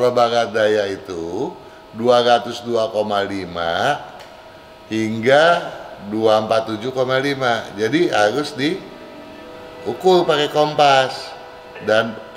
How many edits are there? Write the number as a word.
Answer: zero